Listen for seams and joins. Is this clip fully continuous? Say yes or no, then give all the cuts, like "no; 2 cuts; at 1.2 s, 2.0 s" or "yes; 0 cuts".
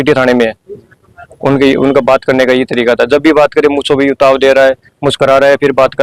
yes; 0 cuts